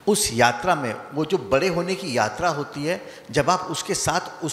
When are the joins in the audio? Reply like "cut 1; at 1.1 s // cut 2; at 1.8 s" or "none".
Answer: none